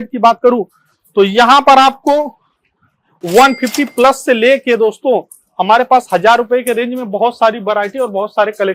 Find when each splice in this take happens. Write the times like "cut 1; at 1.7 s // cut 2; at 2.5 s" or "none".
none

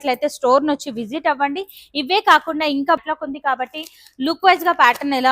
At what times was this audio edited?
cut 1; at 3.0 s

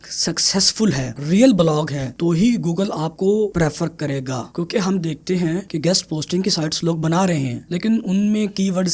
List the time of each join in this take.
none

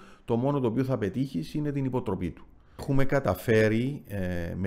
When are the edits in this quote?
cut 1; at 2.8 s

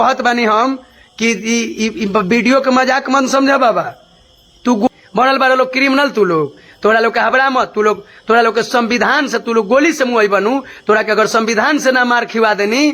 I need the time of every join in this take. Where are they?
cut 1; at 4.9 s

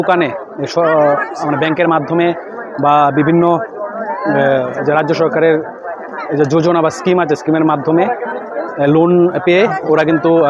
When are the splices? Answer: none

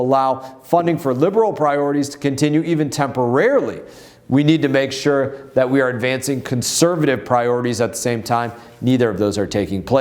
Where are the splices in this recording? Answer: none

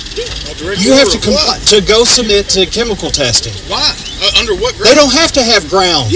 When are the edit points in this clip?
none

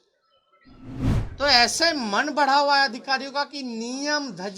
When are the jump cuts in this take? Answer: cut 1; at 1.1 s

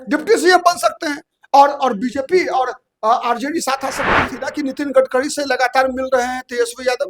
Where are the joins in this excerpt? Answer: cut 1; at 4.4 s

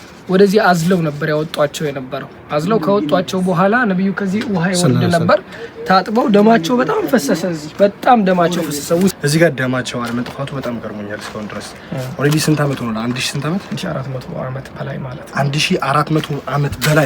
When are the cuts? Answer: cut 1; at 9.2 s

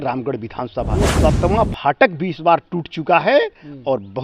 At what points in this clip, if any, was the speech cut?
cut 1; at 1.1 s

